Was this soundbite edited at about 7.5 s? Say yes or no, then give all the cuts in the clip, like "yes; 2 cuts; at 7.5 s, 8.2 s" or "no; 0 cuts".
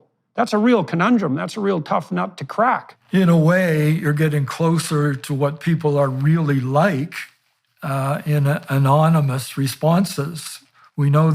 no; 1 cut; at 2.9 s